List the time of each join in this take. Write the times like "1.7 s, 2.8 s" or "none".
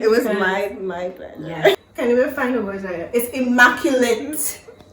1.8 s